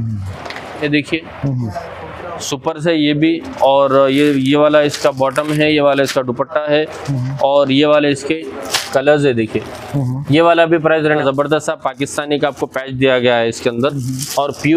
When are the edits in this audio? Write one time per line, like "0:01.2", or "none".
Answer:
0:00.8
0:11.0

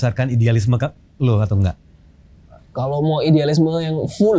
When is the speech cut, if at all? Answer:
none

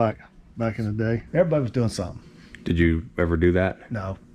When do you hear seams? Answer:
0:01.2

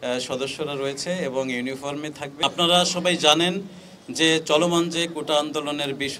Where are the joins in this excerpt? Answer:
0:02.3

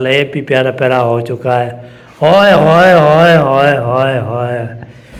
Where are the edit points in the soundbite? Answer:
none

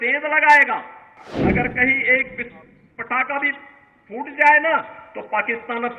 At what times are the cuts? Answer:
0:01.2

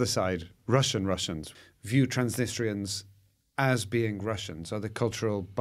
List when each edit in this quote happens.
0:01.5

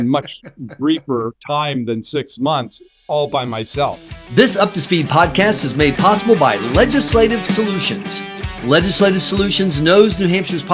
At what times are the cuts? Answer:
0:04.0

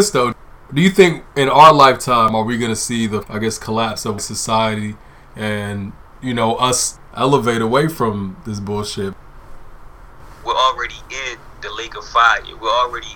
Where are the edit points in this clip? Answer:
0:03.3
0:04.2
0:06.9

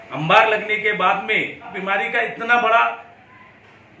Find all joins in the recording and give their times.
0:01.8

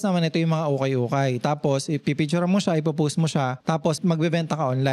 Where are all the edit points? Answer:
0:03.9

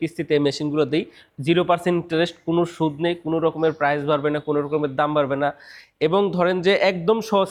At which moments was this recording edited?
none

